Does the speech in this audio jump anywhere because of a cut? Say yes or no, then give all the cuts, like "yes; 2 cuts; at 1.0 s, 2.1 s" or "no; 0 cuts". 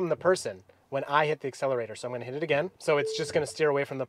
yes; 1 cut; at 2.8 s